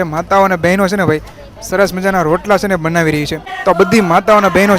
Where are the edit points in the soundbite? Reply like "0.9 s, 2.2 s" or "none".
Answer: 3.5 s

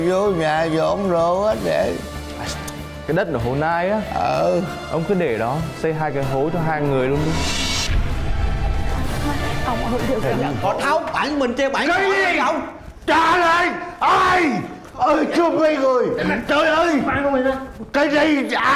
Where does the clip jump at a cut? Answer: 10.6 s

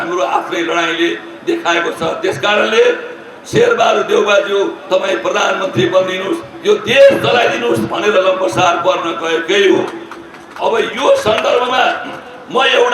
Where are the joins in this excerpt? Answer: none

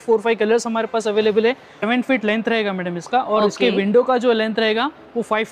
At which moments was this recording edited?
1.7 s

